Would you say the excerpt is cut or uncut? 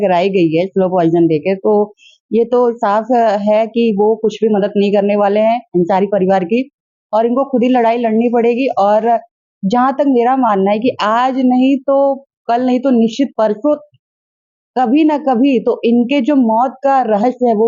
uncut